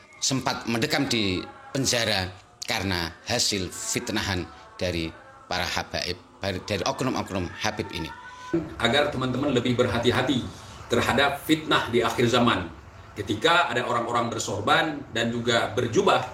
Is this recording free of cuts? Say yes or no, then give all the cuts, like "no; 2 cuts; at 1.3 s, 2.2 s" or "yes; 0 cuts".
no; 1 cut; at 8.5 s